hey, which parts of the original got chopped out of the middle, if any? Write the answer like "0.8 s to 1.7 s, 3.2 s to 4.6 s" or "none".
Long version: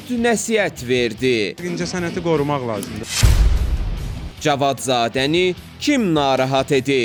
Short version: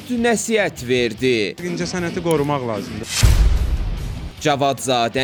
none